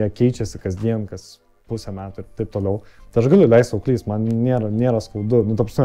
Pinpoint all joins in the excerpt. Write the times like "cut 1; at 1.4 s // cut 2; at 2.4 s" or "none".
none